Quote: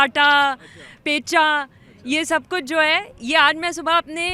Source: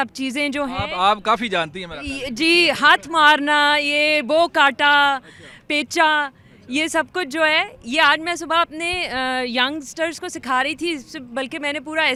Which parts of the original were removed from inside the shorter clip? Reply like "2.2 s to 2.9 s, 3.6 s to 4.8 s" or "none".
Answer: none